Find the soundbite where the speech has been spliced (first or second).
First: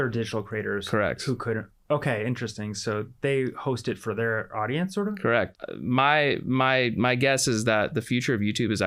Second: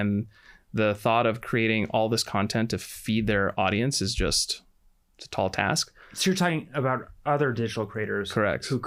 first